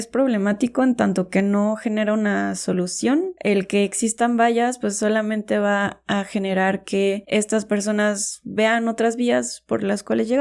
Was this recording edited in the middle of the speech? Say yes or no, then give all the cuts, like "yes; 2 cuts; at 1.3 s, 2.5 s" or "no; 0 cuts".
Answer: yes; 1 cut; at 3.3 s